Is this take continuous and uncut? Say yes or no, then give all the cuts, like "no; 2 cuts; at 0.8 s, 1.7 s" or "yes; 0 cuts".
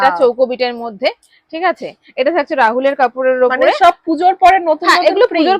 yes; 0 cuts